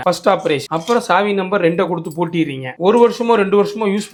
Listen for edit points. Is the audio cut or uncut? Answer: uncut